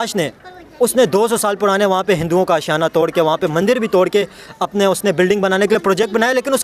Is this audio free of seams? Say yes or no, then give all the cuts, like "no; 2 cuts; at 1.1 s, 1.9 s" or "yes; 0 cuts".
yes; 0 cuts